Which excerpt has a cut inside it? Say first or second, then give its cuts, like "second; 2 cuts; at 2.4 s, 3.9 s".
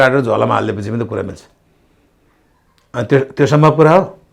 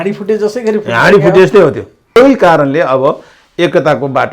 second; 1 cut; at 2.2 s